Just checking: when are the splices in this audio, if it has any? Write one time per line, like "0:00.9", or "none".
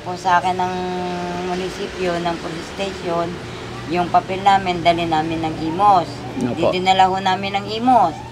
none